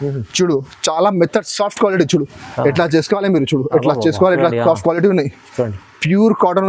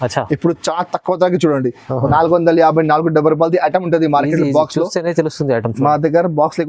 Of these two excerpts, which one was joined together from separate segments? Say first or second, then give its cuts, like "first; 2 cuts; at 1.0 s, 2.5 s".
second; 1 cut; at 2.1 s